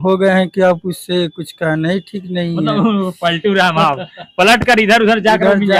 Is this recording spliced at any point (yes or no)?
no